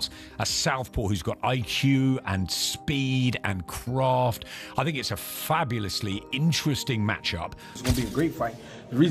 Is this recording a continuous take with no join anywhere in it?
no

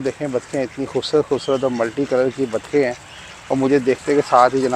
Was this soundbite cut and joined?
no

